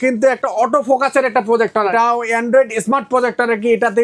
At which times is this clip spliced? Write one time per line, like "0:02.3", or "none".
0:01.9